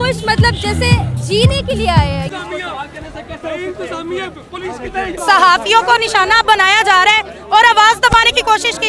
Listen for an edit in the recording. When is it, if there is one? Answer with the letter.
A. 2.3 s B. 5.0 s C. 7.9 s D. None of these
A